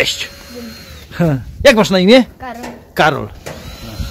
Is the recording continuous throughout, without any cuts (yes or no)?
yes